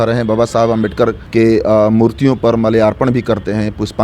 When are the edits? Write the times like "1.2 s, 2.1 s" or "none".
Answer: 1.2 s